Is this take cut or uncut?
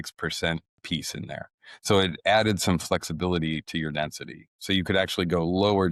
uncut